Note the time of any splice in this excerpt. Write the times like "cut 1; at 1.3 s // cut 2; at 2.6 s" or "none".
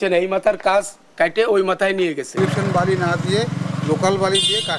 cut 1; at 2.4 s

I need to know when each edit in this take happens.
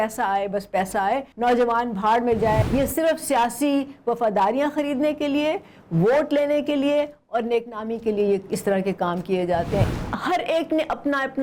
cut 1; at 2.6 s // cut 2; at 9.9 s

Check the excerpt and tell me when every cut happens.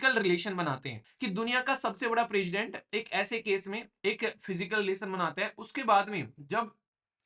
cut 1; at 1.0 s

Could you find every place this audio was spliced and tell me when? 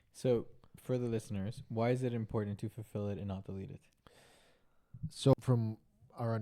cut 1; at 5.3 s

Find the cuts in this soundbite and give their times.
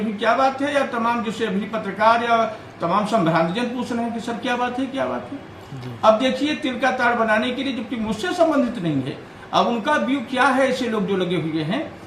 none

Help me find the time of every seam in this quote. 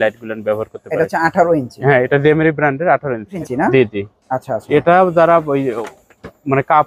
cut 1; at 3.4 s

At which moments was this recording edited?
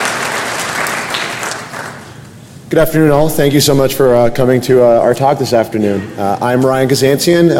none

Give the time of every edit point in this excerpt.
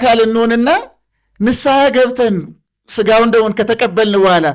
none

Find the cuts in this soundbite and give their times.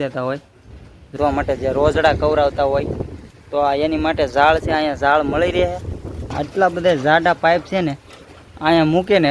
cut 1; at 1.2 s // cut 2; at 6.3 s

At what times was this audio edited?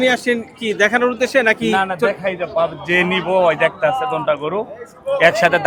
none

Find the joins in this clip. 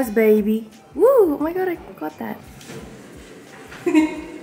none

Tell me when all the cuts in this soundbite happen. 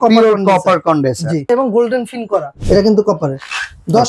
cut 1; at 1.4 s // cut 2; at 2.6 s

